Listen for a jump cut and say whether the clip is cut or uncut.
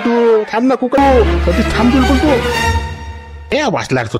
cut